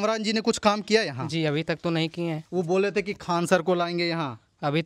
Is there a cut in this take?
yes; 1 cut; at 2.4 s

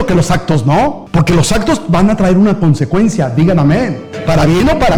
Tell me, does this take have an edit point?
no; 0 cuts

